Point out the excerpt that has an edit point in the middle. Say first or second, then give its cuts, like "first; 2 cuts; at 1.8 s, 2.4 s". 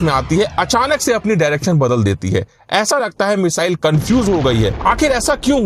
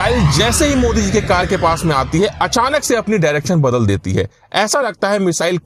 first; 1 cut; at 4.8 s